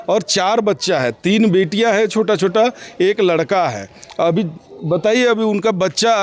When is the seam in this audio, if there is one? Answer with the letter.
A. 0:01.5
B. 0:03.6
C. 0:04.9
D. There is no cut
D